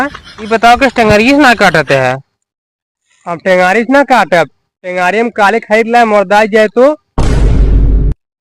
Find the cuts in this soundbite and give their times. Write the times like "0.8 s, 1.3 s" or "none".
7.2 s